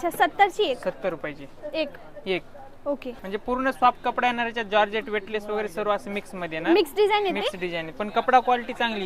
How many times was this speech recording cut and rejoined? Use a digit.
0